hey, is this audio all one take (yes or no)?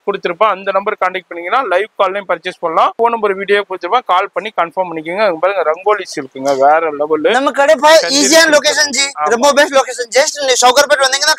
no